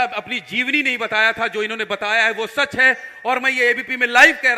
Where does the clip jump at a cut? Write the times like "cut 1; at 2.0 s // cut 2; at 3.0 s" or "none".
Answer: none